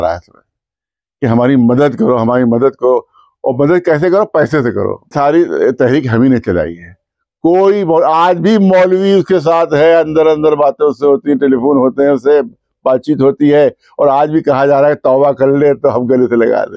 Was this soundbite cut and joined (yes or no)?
yes